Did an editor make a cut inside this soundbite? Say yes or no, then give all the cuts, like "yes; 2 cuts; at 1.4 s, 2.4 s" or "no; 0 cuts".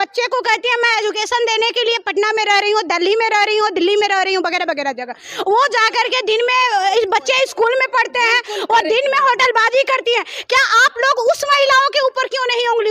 no; 0 cuts